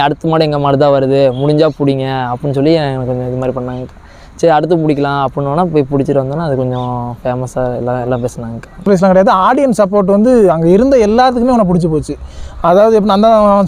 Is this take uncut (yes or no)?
no